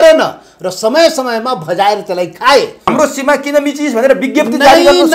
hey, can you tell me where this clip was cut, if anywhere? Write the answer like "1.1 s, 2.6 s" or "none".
2.9 s